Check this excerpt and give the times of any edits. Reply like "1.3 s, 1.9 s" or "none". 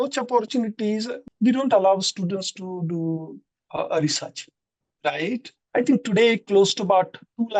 1.2 s, 5.5 s